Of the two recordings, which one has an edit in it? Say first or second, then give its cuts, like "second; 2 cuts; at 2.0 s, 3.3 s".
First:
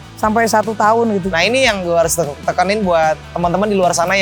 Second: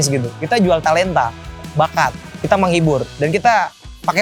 first; 1 cut; at 1.2 s